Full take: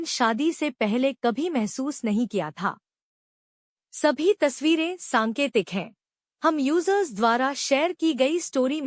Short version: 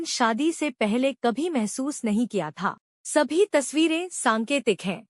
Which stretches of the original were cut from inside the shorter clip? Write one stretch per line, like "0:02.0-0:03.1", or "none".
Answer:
0:02.9-0:03.8